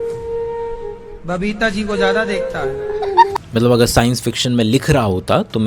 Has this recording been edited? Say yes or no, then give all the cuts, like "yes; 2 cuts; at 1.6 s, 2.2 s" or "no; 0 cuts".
yes; 1 cut; at 3.3 s